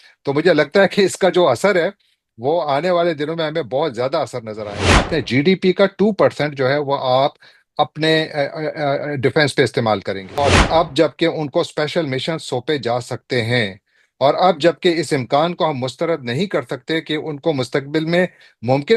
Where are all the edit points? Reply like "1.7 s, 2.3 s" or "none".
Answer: 5.0 s, 10.4 s